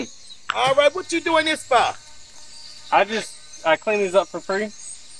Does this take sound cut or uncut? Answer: uncut